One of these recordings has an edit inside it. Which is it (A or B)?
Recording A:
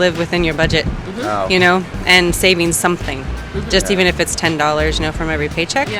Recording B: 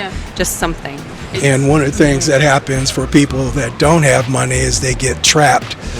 B